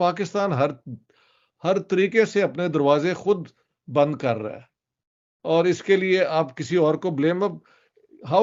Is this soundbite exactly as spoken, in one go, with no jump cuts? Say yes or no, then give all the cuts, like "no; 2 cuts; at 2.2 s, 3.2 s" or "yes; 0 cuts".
yes; 0 cuts